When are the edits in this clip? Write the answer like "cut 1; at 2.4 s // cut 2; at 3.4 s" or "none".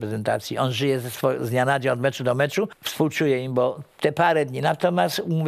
cut 1; at 2.8 s

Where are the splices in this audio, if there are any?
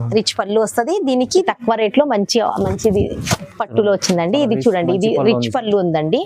cut 1; at 1.4 s

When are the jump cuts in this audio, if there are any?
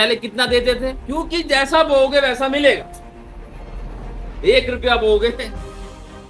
cut 1; at 1.0 s

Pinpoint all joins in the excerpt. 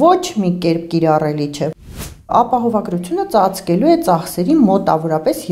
cut 1; at 1.7 s

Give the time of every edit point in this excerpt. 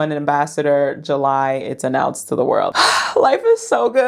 cut 1; at 2.7 s

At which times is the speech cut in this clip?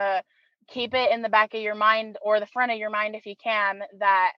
none

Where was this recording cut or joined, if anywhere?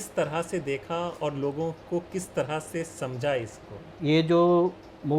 cut 1; at 3.9 s

